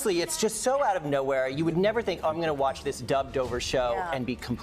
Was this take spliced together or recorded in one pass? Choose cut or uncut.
uncut